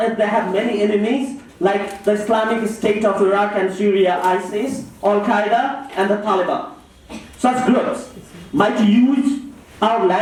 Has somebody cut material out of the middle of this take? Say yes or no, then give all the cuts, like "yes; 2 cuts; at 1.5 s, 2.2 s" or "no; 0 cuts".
no; 0 cuts